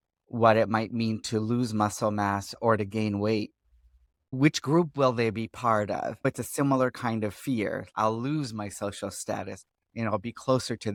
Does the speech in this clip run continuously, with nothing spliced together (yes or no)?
yes